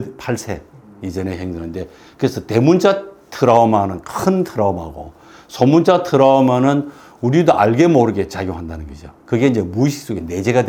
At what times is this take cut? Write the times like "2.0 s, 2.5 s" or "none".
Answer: none